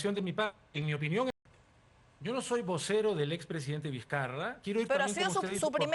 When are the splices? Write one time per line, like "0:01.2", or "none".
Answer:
0:01.3

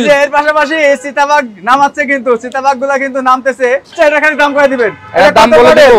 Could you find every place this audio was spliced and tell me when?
0:03.9

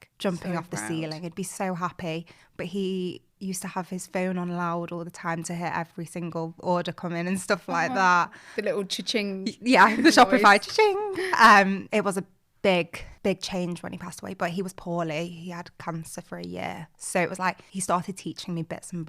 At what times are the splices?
none

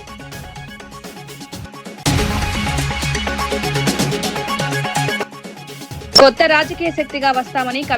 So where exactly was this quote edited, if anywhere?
0:01.1
0:01.9
0:05.1

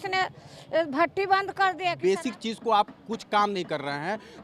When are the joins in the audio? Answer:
0:02.0

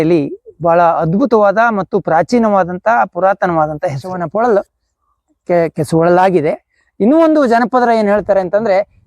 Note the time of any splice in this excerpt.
0:04.2

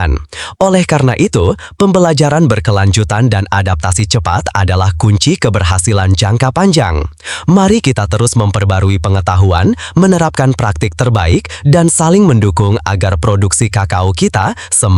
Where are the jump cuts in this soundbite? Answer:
none

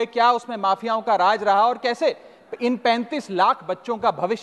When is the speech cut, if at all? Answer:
none

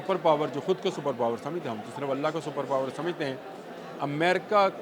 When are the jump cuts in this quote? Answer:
none

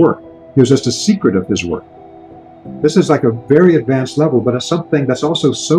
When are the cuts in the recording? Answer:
0:02.2

